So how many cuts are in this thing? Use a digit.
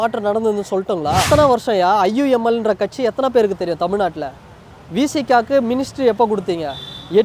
1